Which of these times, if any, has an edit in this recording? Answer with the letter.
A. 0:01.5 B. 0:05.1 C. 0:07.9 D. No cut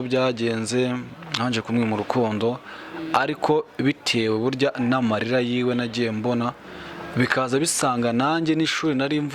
D